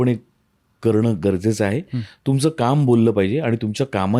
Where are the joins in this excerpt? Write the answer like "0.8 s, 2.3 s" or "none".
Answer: none